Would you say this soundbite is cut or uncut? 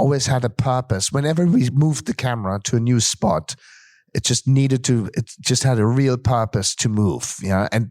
uncut